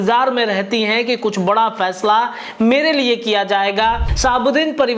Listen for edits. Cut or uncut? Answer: cut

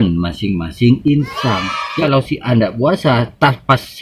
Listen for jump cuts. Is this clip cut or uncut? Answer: cut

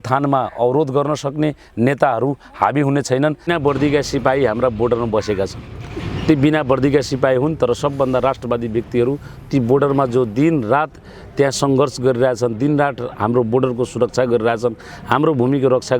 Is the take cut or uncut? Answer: cut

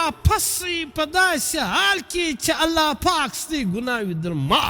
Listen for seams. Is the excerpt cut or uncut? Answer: uncut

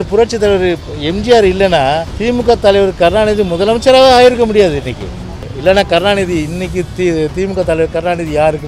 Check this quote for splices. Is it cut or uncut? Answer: cut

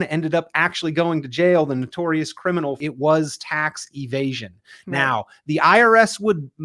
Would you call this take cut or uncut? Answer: cut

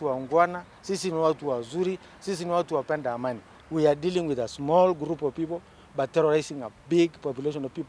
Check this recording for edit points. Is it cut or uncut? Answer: cut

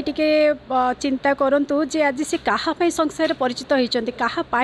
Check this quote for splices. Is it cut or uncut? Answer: uncut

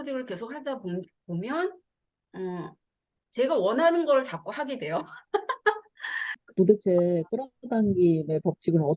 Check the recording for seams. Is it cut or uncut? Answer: cut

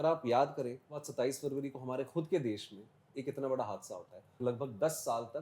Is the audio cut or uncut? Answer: cut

